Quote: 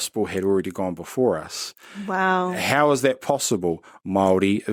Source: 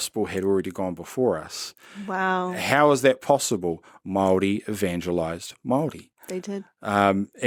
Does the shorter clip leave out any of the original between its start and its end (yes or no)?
no